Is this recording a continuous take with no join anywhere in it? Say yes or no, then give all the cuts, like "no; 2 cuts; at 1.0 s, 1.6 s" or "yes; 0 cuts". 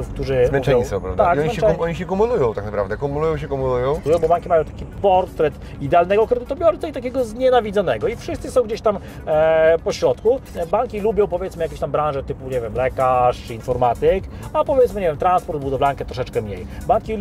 no; 3 cuts; at 4.0 s, 4.8 s, 10.5 s